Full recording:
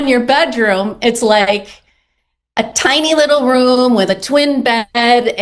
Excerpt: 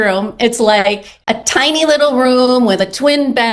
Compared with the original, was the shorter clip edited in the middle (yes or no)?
yes